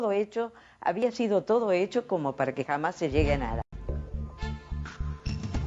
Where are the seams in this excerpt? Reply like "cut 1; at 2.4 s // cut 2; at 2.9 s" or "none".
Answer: cut 1; at 1.5 s